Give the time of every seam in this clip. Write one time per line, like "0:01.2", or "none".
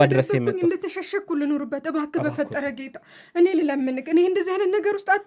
none